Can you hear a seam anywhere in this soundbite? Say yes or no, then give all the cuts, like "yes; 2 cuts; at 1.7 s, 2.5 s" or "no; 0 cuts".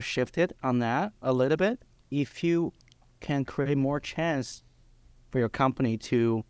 yes; 1 cut; at 1.9 s